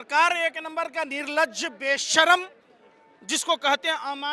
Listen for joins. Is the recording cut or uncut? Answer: uncut